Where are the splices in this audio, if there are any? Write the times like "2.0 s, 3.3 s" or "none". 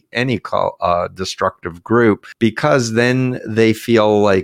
2.3 s